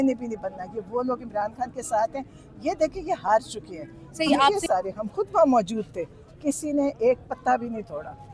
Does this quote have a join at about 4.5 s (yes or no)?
yes